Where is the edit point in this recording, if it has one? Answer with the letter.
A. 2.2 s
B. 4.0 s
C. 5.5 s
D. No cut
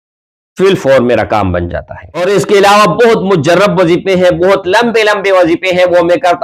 A